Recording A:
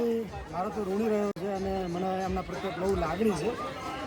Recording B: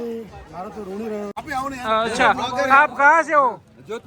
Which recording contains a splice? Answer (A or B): B